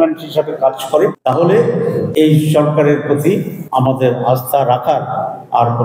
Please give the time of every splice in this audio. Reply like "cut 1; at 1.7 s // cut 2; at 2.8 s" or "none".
cut 1; at 1.2 s // cut 2; at 2.1 s // cut 3; at 3.6 s